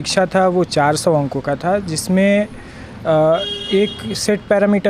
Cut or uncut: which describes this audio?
uncut